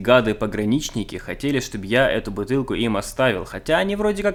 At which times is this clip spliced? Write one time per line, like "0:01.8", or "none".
none